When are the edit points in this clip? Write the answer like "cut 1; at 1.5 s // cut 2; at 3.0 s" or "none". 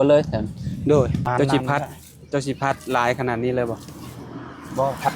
cut 1; at 1.2 s